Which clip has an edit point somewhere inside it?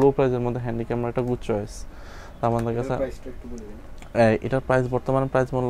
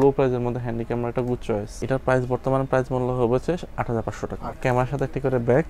second; 2 cuts; at 1.8 s, 4.6 s

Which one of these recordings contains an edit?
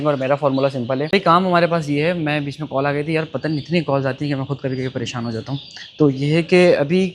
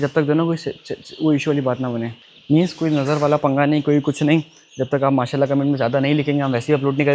first; 1 cut; at 1.0 s

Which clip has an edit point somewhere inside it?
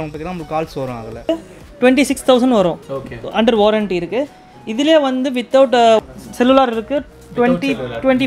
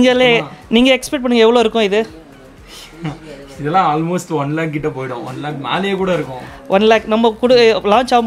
first; 2 cuts; at 1.3 s, 6.0 s

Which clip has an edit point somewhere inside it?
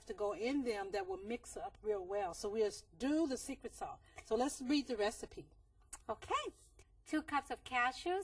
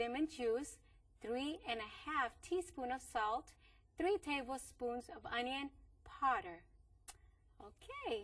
second; 1 cut; at 3.2 s

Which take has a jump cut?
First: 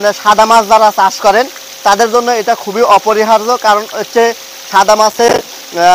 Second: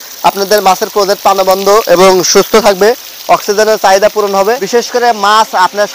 second; 1 cut; at 4.4 s

